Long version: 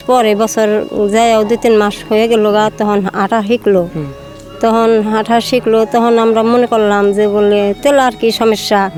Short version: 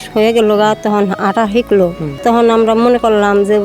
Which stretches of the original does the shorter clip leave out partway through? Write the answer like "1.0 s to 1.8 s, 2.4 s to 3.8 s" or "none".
4.2 s to 5.9 s